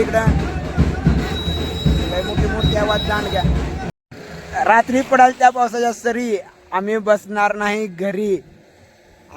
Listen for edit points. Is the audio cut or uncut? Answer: cut